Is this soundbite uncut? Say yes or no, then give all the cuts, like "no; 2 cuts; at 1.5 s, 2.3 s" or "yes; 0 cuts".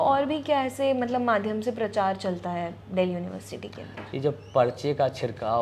yes; 0 cuts